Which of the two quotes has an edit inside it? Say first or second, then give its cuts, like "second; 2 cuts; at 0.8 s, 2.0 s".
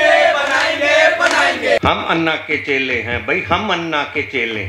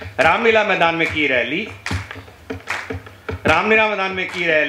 first; 1 cut; at 1.8 s